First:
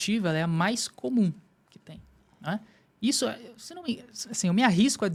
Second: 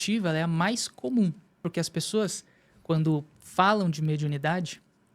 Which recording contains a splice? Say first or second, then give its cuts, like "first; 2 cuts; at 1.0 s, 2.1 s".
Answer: second; 1 cut; at 1.6 s